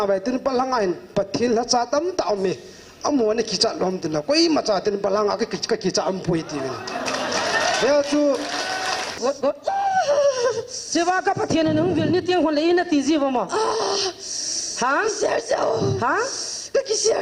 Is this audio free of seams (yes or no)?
no